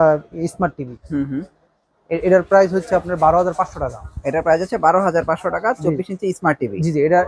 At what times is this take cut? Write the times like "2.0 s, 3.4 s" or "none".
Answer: none